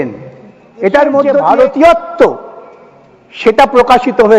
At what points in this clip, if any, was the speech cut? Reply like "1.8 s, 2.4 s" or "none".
1.4 s

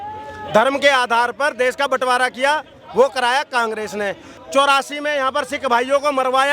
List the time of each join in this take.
4.3 s

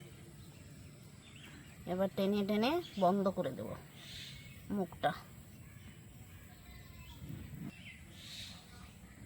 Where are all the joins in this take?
1.7 s, 7.7 s

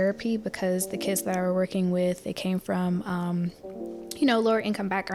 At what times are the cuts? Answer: none

